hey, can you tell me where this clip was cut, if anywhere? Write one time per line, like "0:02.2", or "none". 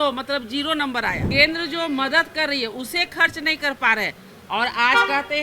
0:01.2